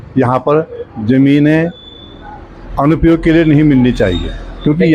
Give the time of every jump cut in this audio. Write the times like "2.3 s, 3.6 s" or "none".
none